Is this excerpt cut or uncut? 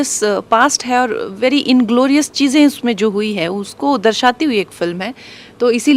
uncut